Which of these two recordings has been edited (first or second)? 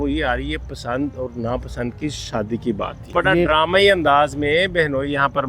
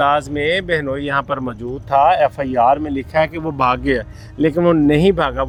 first